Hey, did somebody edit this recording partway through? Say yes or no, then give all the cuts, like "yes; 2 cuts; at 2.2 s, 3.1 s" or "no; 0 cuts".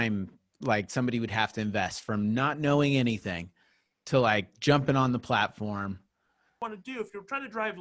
yes; 1 cut; at 6.6 s